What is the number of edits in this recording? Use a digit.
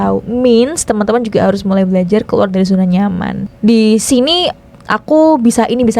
2